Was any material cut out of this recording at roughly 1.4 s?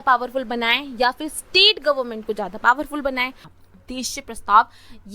no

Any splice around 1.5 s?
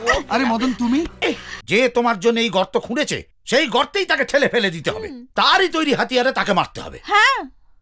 yes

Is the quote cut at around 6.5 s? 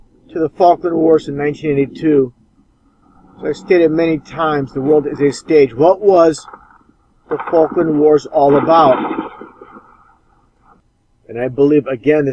no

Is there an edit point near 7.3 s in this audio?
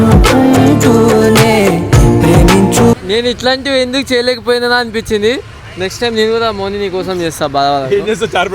no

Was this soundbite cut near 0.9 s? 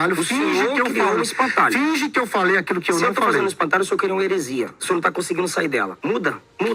no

